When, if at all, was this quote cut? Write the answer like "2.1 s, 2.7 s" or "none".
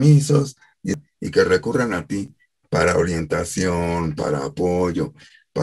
1.0 s